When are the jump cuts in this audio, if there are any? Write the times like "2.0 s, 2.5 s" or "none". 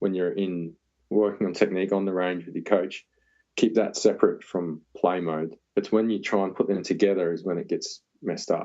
5.6 s